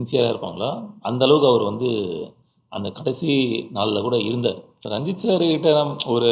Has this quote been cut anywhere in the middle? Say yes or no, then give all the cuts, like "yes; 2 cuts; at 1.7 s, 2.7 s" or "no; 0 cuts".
yes; 1 cut; at 4.7 s